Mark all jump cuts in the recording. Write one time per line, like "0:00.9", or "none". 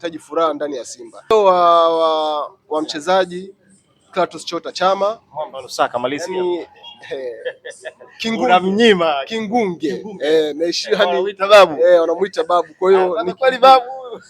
0:01.3